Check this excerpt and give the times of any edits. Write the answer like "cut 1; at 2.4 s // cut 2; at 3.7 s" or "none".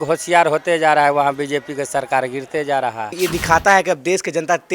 cut 1; at 3.2 s